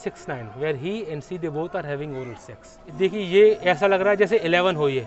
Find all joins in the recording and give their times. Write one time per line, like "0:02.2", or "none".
0:02.9